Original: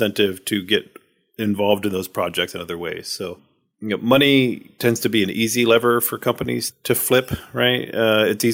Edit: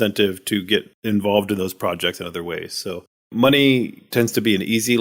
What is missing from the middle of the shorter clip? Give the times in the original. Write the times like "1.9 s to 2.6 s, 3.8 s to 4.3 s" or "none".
0.9 s to 1.3 s, 3.7 s to 4.0 s